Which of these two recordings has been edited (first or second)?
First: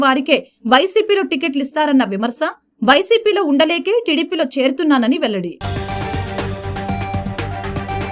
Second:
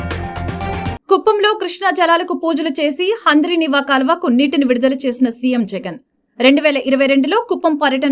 second